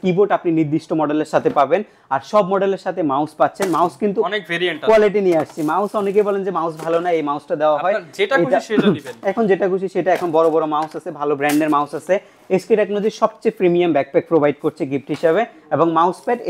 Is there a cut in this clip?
no; 0 cuts

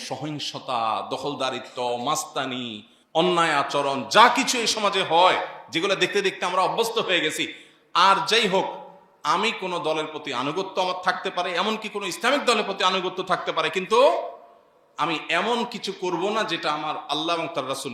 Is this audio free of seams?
yes; 0 cuts

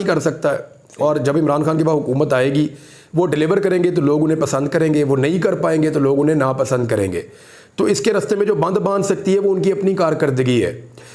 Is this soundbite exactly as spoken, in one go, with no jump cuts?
yes; 0 cuts

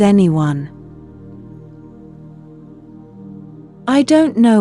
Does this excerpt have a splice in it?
no; 0 cuts

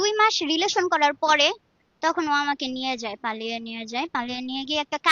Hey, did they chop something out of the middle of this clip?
no; 0 cuts

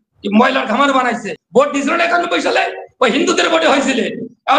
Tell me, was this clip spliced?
yes; 1 cut; at 1.3 s

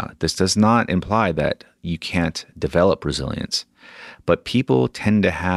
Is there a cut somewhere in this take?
no; 0 cuts

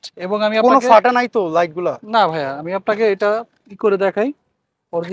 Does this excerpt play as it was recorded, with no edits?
yes; 0 cuts

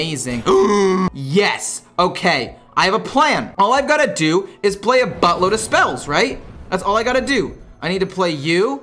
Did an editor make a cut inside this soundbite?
yes; 2 cuts; at 1.1 s, 3.5 s

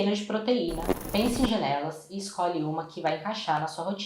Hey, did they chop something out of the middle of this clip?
yes; 1 cut; at 0.9 s

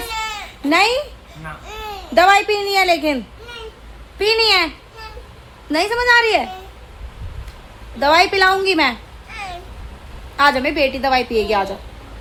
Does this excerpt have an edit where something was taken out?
no; 0 cuts

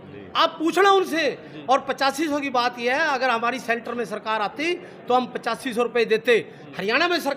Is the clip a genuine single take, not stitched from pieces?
yes; 0 cuts

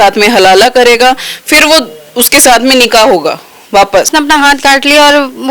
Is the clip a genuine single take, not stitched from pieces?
no; 1 cut; at 4.1 s

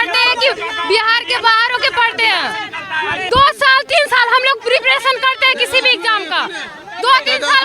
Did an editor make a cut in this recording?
yes; 1 cut; at 3.2 s

